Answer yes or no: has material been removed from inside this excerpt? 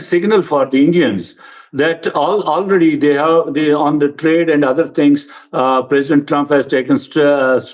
no